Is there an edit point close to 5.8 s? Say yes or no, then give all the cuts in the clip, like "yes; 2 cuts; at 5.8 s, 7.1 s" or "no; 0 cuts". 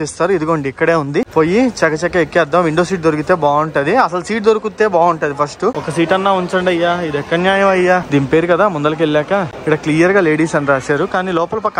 yes; 4 cuts; at 1.3 s, 5.8 s, 8.1 s, 9.5 s